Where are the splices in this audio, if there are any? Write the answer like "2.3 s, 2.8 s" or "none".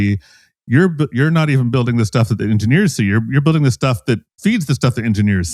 none